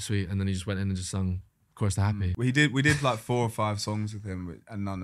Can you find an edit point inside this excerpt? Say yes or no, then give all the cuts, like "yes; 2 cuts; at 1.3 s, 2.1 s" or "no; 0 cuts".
yes; 1 cut; at 2.3 s